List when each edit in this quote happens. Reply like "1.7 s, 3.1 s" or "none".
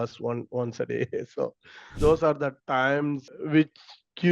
2.0 s, 3.2 s